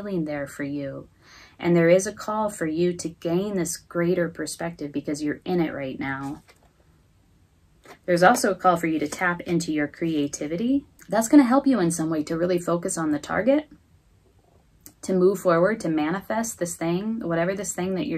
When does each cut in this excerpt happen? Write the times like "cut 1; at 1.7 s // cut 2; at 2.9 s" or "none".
cut 1; at 11.0 s